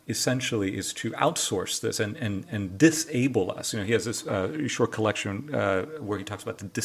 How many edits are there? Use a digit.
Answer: 0